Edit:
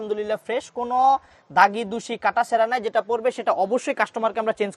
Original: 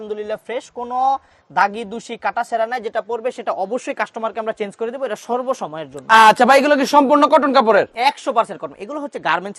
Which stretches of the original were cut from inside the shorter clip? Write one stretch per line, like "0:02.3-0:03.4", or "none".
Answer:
none